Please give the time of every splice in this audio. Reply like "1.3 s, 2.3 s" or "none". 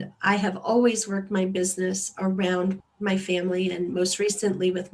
2.8 s